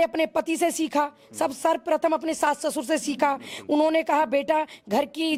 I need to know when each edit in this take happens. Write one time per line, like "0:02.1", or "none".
none